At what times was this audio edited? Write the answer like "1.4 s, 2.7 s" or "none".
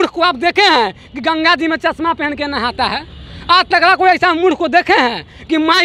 none